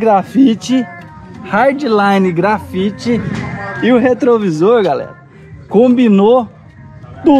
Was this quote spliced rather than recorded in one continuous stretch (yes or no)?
no